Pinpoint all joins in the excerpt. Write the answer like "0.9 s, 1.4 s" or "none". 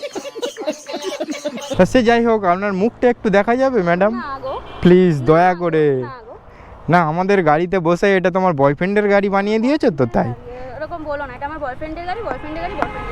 1.6 s